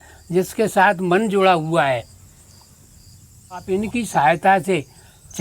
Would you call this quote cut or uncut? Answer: cut